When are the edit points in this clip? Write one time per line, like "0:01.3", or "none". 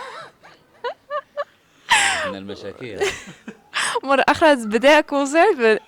none